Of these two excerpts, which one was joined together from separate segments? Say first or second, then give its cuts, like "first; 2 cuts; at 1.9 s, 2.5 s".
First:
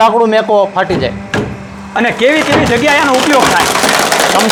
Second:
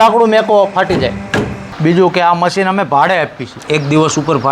second; 2 cuts; at 1.6 s, 3.5 s